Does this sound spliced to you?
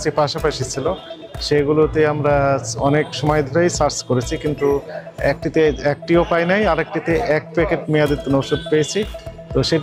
no; 0 cuts

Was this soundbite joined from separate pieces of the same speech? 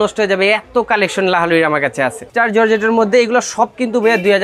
yes; 1 cut; at 2.2 s

